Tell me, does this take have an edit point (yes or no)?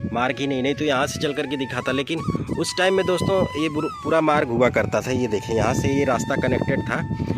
no